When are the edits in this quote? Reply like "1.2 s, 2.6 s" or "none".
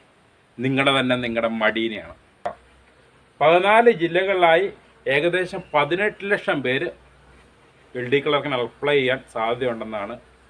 2.5 s